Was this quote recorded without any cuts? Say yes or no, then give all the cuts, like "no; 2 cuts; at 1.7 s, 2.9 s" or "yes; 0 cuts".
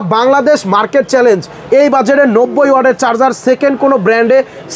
yes; 0 cuts